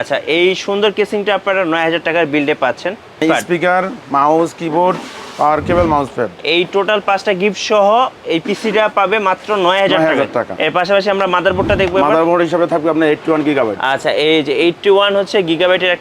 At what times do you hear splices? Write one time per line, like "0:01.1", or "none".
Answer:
0:03.2
0:10.5